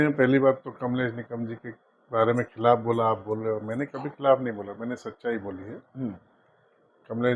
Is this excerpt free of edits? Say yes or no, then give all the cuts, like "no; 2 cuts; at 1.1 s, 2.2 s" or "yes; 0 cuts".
yes; 0 cuts